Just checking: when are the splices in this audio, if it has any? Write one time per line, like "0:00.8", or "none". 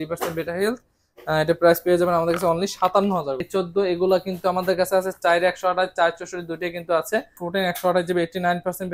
0:03.4
0:07.4